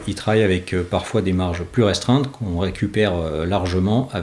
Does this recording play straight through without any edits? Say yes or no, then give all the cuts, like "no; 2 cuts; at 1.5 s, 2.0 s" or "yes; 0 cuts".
yes; 0 cuts